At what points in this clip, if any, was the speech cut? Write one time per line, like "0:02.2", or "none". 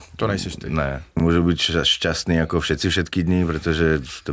0:01.2